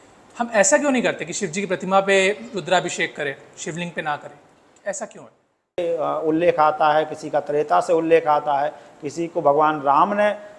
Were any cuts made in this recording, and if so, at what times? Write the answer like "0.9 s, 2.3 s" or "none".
5.8 s